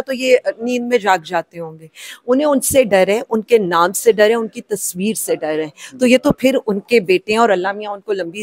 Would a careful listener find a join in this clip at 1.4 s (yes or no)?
no